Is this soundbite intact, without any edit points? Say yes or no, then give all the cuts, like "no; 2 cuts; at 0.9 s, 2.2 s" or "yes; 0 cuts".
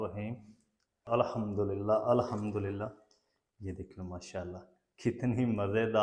no; 1 cut; at 1.0 s